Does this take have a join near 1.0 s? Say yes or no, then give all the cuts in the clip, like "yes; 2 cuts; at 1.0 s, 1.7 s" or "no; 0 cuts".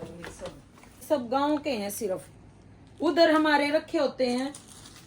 yes; 1 cut; at 1.0 s